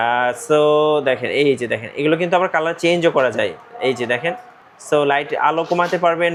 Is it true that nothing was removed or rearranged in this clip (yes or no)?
yes